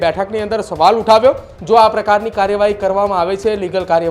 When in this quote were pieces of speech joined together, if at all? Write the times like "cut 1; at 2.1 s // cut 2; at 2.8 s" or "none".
cut 1; at 1.5 s